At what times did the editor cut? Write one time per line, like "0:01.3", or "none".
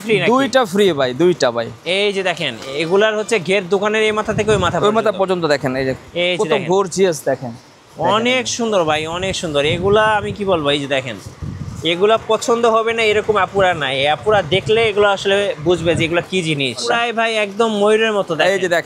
0:01.8
0:16.9